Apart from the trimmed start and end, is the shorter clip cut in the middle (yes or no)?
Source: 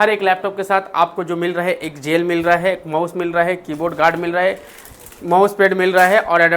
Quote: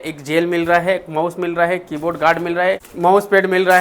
yes